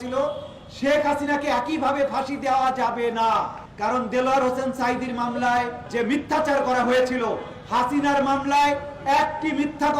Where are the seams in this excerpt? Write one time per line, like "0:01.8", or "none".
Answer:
0:03.6
0:05.8